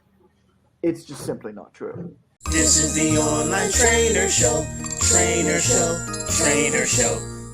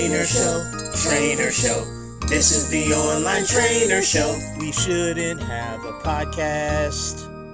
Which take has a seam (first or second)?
first